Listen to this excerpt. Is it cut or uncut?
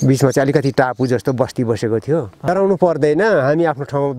cut